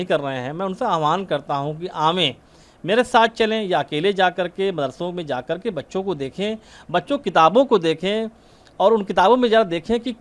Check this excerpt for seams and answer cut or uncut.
uncut